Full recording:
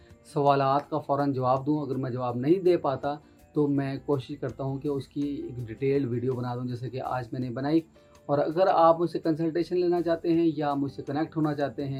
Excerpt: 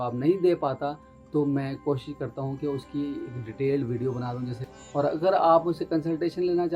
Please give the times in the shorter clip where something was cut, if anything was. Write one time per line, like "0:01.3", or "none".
0:04.7